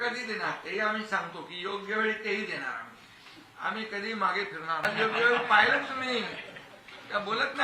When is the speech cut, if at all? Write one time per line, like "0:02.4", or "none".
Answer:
0:04.9